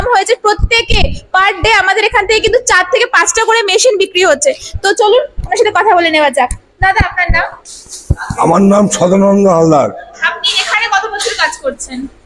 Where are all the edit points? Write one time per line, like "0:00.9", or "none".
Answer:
none